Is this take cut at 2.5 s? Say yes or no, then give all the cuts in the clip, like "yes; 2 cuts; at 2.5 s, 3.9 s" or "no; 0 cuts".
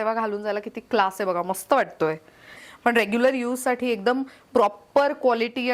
yes; 1 cut; at 2.5 s